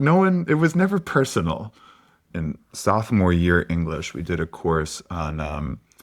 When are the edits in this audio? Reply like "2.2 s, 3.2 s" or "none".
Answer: 2.2 s

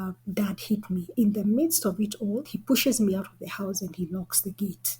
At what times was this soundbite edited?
1.1 s, 2.5 s

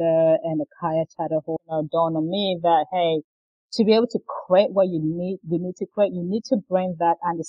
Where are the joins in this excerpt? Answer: 1.6 s

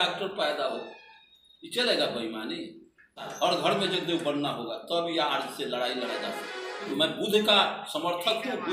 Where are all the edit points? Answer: 3.2 s, 6.9 s

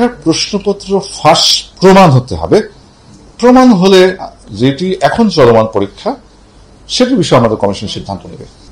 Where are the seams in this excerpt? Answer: none

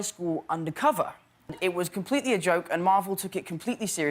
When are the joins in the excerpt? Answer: 1.5 s

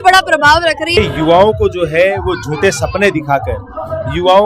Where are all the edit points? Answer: 1.0 s

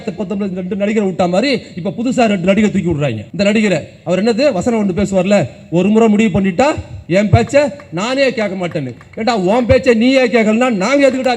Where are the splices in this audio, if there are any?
3.2 s, 6.9 s

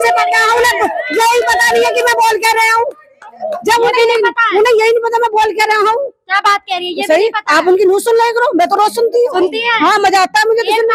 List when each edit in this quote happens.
none

